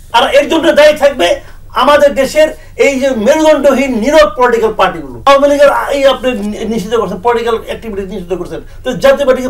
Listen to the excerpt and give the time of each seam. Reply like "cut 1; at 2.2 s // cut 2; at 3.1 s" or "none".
cut 1; at 5.1 s